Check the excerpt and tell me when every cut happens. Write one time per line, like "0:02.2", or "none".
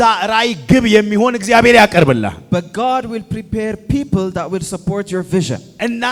none